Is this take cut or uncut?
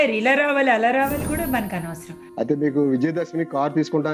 cut